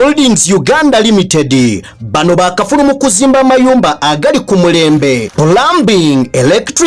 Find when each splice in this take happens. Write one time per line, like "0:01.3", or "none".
none